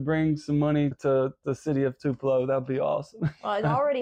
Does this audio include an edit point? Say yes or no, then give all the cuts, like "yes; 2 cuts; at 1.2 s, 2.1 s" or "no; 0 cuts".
no; 0 cuts